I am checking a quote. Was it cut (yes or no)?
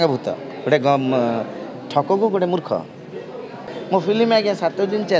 yes